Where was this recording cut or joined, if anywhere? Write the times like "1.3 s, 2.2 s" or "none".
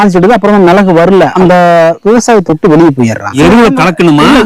1.3 s, 3.4 s